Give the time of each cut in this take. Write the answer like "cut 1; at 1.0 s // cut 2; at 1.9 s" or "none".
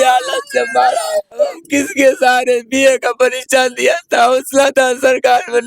cut 1; at 1.6 s